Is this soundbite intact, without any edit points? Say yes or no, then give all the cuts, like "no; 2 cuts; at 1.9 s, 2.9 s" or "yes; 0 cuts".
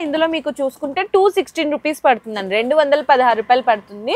yes; 0 cuts